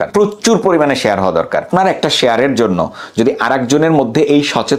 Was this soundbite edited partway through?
yes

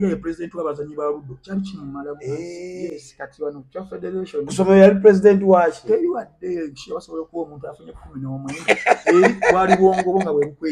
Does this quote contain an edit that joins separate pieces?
no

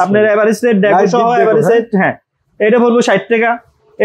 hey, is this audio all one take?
yes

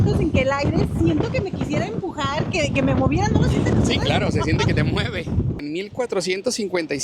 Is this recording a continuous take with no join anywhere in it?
no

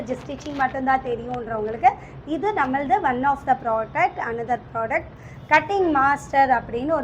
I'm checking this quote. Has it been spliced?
no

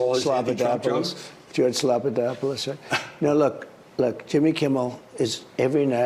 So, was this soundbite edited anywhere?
yes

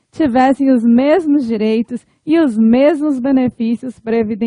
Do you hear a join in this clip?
no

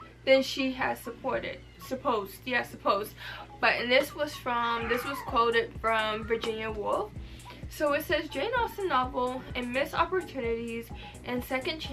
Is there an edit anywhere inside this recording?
no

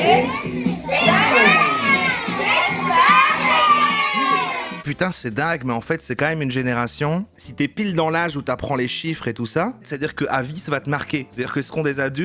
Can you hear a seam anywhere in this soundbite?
yes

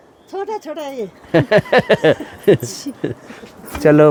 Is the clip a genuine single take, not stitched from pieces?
yes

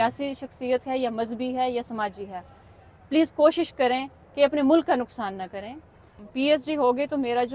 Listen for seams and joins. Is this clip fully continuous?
no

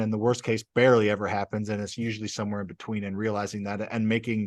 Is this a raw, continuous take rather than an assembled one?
yes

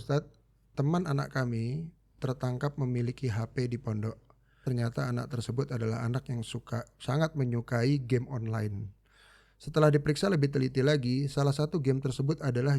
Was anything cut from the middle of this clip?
yes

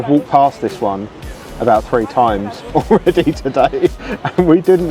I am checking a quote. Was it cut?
no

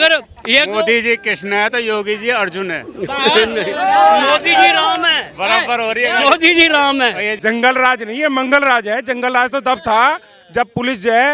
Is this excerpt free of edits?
no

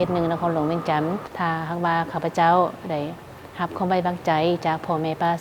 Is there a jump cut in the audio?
yes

